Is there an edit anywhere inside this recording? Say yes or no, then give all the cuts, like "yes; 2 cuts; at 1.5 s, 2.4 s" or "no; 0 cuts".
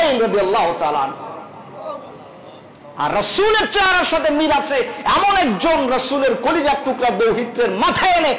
no; 0 cuts